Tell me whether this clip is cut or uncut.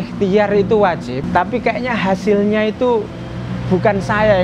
cut